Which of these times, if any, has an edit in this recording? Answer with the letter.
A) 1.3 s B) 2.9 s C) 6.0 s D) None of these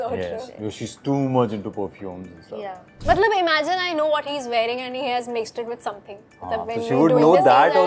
B